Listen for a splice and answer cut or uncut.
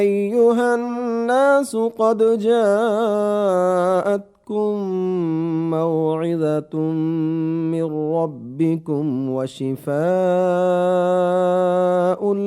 cut